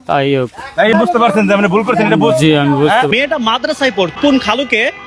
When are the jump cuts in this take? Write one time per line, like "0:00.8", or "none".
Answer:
0:00.9
0:03.1
0:04.2